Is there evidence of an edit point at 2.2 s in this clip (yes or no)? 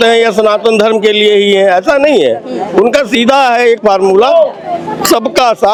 no